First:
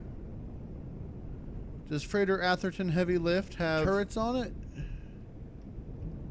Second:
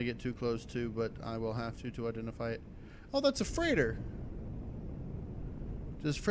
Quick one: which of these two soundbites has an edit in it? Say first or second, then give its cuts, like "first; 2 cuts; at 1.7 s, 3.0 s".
first; 1 cut; at 3.9 s